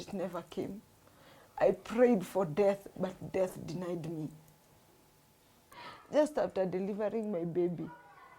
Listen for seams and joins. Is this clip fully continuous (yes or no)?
no